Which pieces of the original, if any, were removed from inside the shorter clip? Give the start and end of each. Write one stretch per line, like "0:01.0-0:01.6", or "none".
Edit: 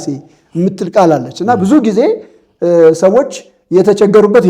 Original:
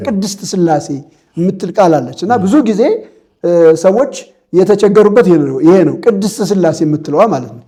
none